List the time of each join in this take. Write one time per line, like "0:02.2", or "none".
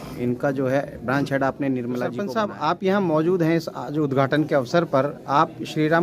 0:02.3